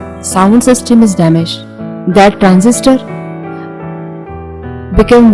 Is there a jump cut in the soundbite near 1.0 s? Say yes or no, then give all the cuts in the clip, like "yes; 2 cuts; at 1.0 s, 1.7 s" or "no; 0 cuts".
no; 0 cuts